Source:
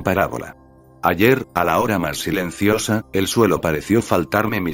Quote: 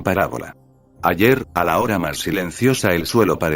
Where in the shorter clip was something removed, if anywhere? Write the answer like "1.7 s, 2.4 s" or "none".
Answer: 2.6 s